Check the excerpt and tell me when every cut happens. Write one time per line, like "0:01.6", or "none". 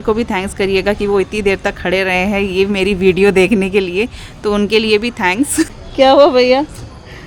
0:05.8